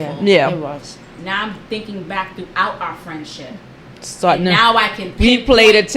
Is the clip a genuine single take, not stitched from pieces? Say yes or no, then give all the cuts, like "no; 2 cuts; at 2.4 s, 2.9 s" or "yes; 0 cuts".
no; 1 cut; at 1.1 s